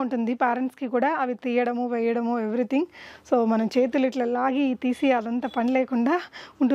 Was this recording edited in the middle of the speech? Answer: no; 0 cuts

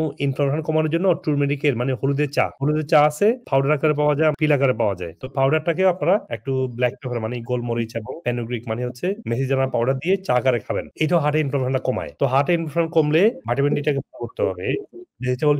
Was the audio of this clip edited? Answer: yes; 1 cut; at 4.3 s

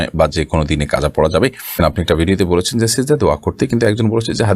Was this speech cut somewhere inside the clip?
yes; 1 cut; at 1.8 s

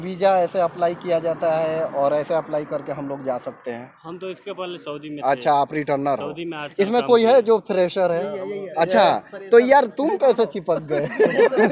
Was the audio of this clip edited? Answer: no; 0 cuts

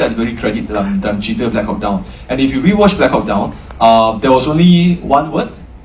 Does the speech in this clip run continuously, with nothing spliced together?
yes; 0 cuts

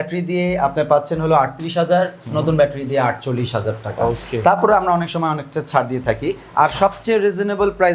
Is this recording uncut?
yes; 0 cuts

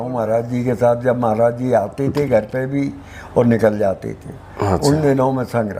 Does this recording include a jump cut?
no; 0 cuts

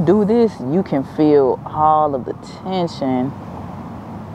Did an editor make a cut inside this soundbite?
no; 0 cuts

